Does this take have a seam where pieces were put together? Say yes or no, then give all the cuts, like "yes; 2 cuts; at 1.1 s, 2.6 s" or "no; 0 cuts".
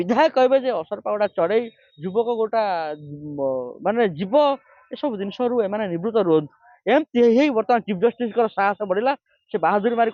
no; 0 cuts